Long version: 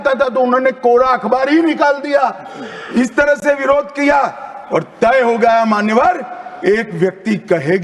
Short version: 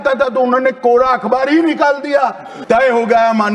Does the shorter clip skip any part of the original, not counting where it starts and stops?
yes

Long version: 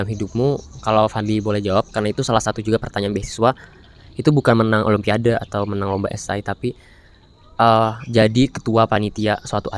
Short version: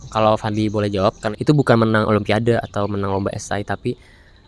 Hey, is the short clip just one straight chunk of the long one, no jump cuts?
no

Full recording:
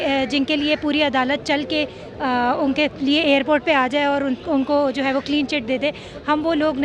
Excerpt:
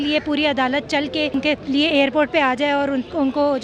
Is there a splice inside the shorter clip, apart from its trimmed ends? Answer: yes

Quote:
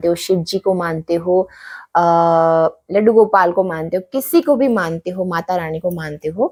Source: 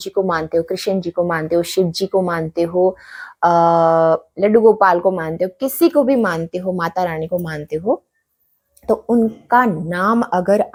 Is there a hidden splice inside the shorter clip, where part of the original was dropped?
no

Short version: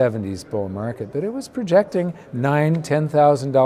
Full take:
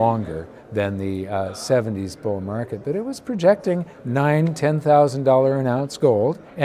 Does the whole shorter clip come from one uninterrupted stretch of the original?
yes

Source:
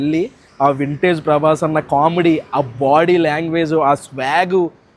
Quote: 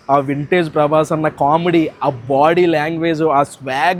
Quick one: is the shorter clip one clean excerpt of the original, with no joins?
yes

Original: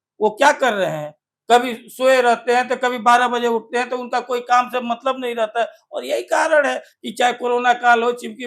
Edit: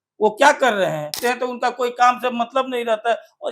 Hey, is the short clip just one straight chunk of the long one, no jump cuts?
no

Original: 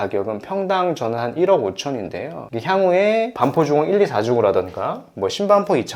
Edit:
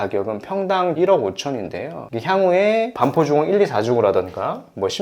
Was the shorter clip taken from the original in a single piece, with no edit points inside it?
no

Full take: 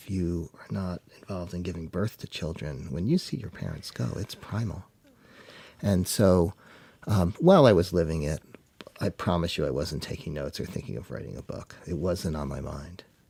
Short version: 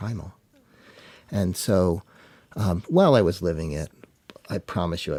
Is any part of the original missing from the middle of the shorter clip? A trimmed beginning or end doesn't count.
no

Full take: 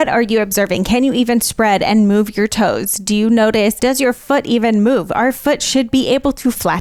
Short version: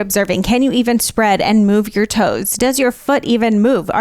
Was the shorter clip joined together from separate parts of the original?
yes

